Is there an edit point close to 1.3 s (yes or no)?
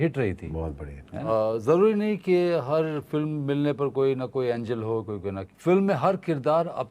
yes